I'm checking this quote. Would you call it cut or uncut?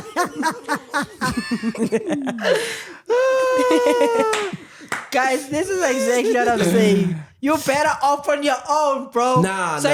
uncut